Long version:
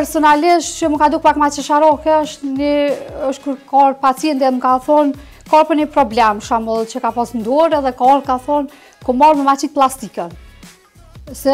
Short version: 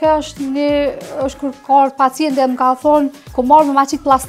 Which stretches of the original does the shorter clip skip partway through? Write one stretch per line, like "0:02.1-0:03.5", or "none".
0:05.3-0:08.9